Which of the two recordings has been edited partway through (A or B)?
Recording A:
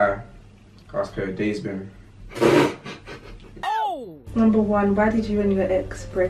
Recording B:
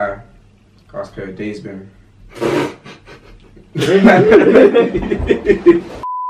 A